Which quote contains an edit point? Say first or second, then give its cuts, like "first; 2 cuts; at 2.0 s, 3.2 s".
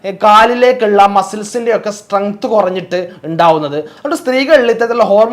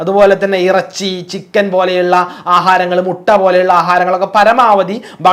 first; 1 cut; at 3.9 s